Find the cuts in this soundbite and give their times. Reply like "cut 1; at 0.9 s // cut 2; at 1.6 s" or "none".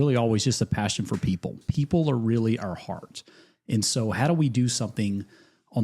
cut 1; at 1.6 s